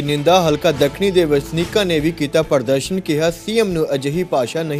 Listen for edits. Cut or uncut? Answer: uncut